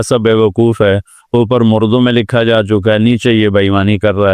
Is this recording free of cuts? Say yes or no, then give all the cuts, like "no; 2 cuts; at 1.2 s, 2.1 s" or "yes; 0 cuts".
yes; 0 cuts